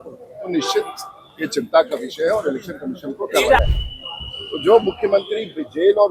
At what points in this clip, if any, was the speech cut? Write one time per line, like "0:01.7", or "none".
0:03.6